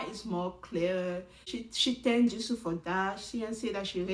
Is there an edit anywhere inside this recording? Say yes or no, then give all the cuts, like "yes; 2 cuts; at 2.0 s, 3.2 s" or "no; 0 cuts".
no; 0 cuts